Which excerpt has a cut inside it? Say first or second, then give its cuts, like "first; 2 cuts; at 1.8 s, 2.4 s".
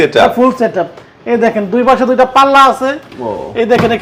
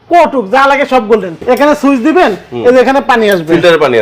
second; 1 cut; at 1.4 s